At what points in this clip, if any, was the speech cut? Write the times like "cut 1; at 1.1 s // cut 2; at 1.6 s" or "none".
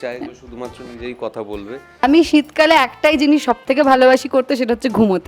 cut 1; at 2.0 s